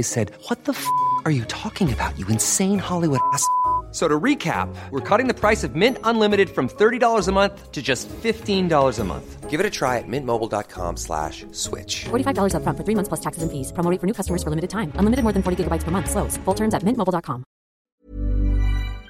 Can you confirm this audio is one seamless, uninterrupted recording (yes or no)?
no